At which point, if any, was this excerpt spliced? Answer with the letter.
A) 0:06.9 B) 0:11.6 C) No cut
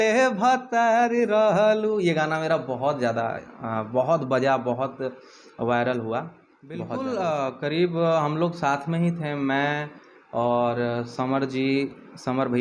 A